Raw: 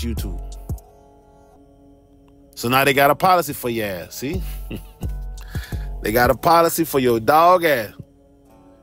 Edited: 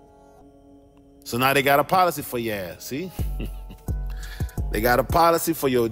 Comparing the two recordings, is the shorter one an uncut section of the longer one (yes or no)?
no